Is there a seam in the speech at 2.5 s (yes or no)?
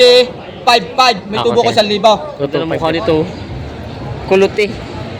yes